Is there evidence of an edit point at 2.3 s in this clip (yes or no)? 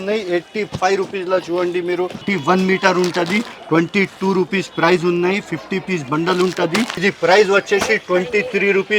yes